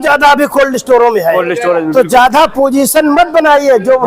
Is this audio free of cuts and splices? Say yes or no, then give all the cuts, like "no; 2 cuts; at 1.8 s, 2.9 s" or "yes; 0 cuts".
yes; 0 cuts